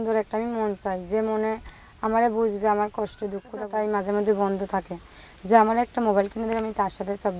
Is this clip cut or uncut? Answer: cut